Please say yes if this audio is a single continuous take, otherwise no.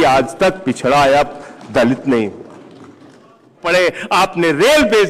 no